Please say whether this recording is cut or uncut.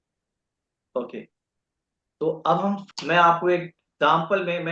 cut